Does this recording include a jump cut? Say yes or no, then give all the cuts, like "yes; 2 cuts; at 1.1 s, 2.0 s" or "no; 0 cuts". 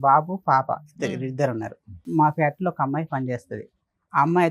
yes; 1 cut; at 2.1 s